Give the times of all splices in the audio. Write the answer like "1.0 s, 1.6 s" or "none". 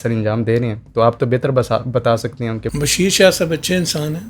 2.7 s